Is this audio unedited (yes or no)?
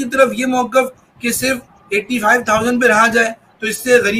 yes